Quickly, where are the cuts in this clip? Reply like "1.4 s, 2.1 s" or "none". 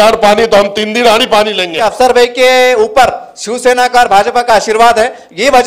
1.7 s